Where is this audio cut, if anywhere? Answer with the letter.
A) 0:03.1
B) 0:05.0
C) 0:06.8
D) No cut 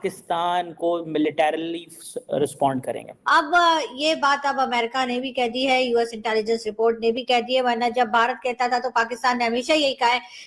A